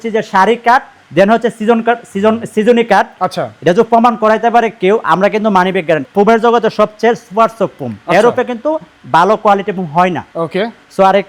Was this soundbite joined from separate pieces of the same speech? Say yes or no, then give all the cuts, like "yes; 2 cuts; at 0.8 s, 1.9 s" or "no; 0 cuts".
yes; 1 cut; at 6.1 s